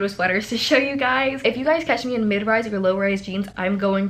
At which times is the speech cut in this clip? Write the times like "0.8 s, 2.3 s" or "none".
1.4 s